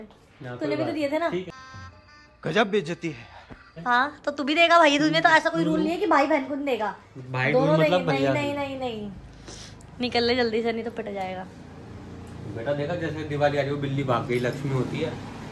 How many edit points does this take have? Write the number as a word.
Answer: zero